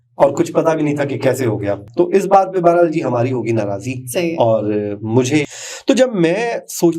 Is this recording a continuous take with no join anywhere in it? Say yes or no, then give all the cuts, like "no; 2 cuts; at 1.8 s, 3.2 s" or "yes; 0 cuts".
no; 2 cuts; at 1.8 s, 5.5 s